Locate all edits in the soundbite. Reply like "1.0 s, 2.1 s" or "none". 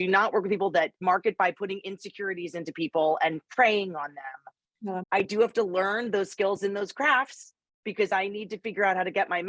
1.0 s, 5.0 s

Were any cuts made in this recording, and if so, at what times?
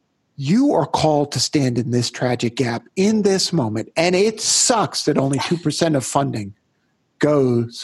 none

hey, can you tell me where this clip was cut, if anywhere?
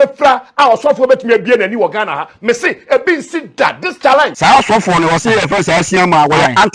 4.3 s

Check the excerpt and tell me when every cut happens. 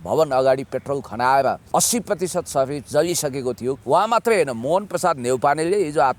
1.6 s, 3.8 s

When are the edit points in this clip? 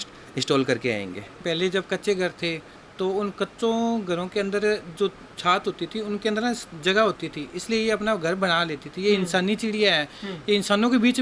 1.4 s

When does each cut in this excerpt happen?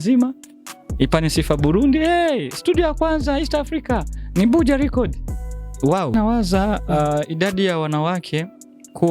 6.1 s

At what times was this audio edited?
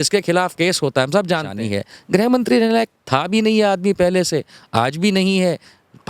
1.5 s

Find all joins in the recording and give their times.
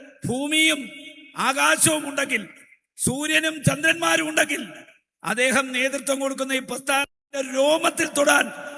5.7 s

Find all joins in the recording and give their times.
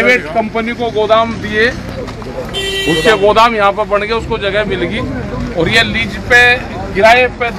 none

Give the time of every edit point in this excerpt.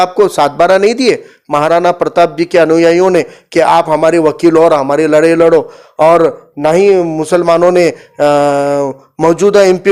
none

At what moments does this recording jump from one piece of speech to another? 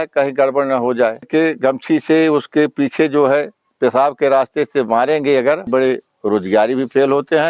1.3 s, 5.7 s

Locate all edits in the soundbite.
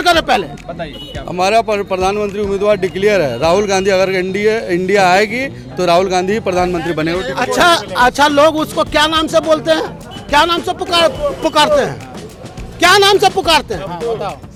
none

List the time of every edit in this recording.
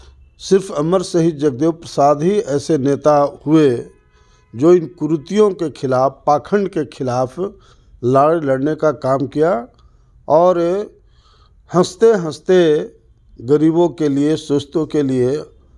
none

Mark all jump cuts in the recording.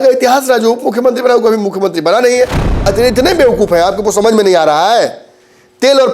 2.7 s

